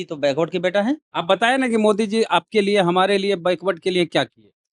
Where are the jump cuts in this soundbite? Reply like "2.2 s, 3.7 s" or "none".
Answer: 1.1 s